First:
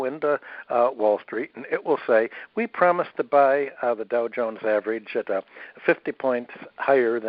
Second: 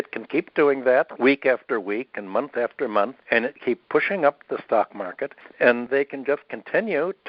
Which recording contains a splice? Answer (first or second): second